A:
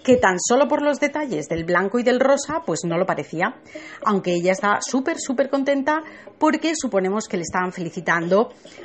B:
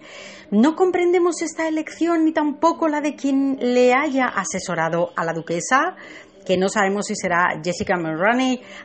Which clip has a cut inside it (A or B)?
B